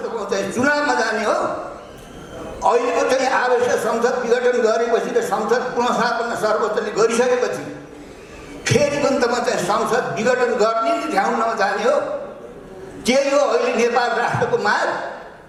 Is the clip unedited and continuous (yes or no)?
yes